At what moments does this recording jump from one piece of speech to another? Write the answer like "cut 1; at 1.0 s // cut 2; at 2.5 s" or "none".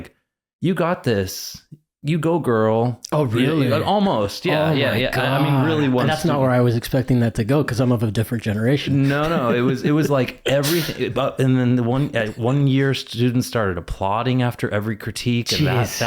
none